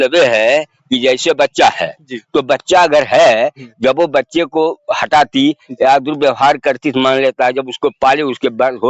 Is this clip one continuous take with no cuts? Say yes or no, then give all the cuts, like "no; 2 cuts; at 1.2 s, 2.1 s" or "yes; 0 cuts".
yes; 0 cuts